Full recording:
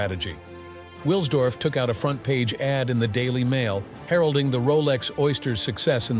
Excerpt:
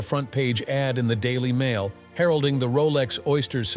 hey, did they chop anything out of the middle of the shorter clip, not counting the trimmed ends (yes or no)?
no